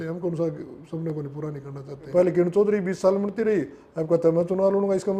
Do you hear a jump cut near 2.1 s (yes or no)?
yes